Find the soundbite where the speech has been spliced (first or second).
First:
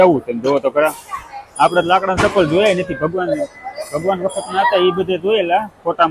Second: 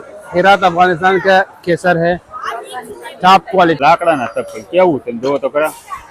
second